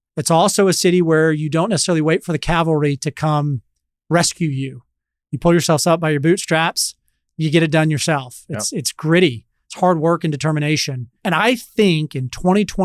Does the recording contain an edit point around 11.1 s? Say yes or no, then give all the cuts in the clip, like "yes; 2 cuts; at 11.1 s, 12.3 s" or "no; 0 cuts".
yes; 1 cut; at 11.1 s